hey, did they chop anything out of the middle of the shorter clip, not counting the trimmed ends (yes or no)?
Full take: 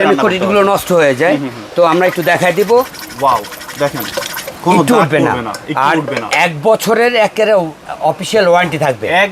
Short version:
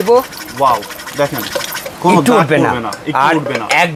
no